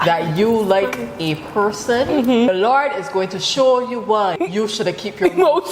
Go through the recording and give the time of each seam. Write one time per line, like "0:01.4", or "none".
0:02.5
0:04.4